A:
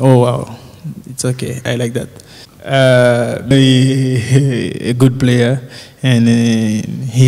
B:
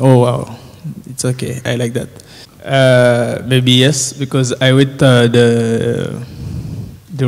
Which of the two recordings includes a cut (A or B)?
B